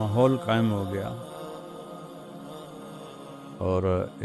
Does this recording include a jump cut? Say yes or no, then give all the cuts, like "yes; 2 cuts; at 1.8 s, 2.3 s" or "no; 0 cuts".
yes; 2 cuts; at 1.1 s, 3.5 s